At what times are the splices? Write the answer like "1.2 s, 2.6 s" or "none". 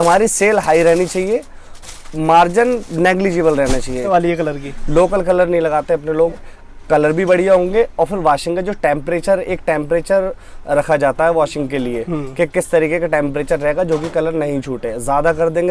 4.1 s